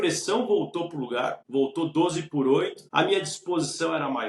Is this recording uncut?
no; 2 cuts; at 1.4 s, 2.8 s

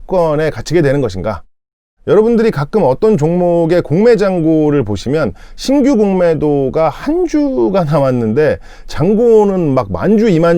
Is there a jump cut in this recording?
yes; 1 cut; at 1.5 s

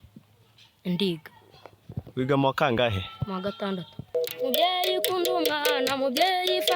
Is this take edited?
yes; 1 cut; at 4.1 s

